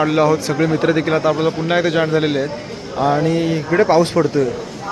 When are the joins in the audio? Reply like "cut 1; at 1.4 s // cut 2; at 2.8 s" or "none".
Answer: none

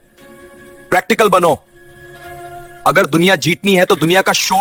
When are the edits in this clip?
none

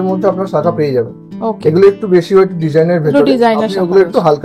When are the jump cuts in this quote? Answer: none

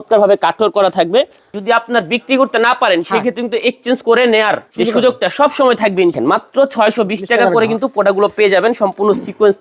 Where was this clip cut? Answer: cut 1; at 1.5 s // cut 2; at 4.7 s // cut 3; at 6.1 s

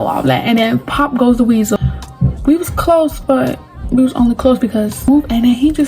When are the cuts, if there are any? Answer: cut 1; at 1.8 s // cut 2; at 5.1 s

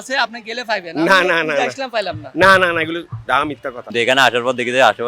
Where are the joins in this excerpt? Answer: cut 1; at 3.8 s

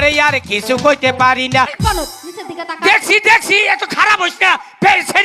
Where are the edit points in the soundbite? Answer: cut 1; at 1.8 s

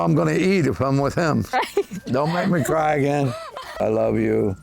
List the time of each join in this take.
cut 1; at 1.5 s // cut 2; at 3.8 s

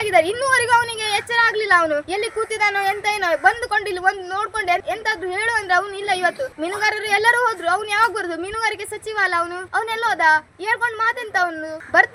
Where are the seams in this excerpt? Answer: none

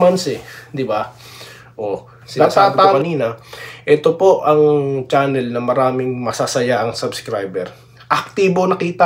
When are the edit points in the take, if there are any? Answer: cut 1; at 3.0 s

